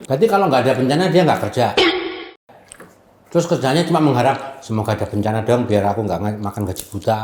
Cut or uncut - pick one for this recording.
uncut